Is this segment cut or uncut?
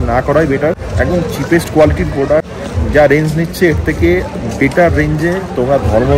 cut